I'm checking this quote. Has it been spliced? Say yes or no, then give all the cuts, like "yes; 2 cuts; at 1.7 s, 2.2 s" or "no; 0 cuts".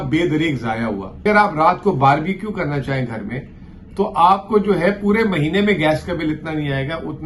yes; 1 cut; at 1.2 s